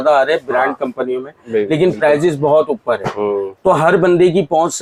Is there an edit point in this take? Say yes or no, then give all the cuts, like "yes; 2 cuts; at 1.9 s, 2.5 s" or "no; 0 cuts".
no; 0 cuts